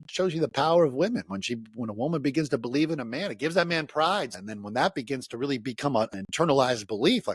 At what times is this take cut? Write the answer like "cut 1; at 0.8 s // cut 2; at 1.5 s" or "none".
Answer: cut 1; at 4.3 s // cut 2; at 6.1 s